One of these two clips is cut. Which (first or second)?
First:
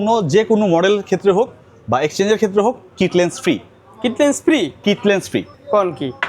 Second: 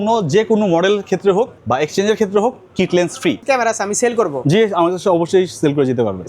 second